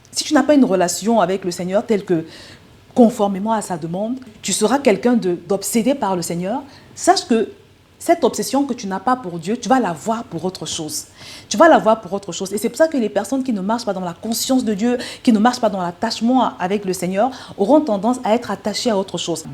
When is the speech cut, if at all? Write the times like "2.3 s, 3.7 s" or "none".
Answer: 4.4 s